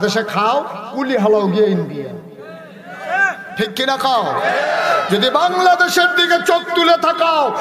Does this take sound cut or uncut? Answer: cut